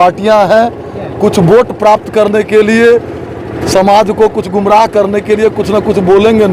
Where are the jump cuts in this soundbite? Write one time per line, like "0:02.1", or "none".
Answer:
none